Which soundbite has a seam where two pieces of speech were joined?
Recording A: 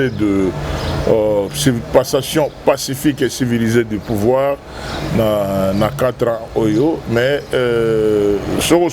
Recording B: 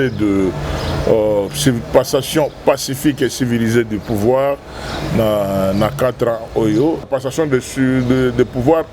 B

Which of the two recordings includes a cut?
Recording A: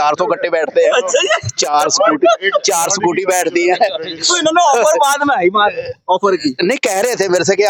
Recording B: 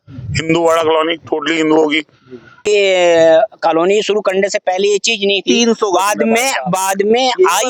B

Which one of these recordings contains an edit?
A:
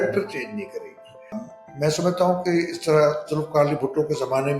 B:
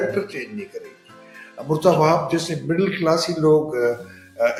A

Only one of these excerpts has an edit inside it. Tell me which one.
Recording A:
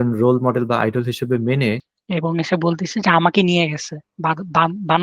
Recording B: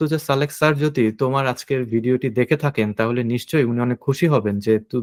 A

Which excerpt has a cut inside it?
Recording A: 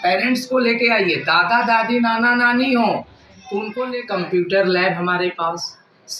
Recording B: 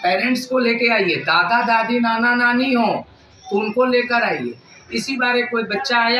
A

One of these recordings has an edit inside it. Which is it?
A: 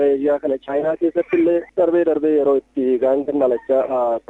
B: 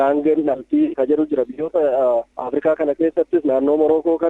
B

